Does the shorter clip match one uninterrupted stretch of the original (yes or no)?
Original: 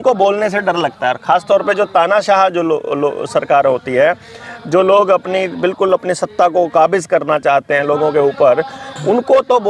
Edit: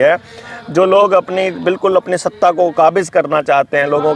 yes